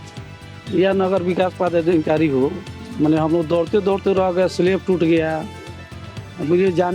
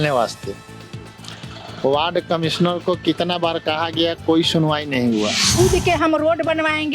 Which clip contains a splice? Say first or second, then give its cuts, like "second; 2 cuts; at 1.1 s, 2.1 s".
second; 1 cut; at 5.5 s